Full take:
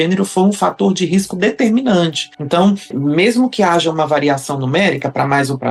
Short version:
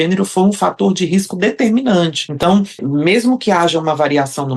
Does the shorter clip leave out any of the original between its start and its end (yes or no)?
yes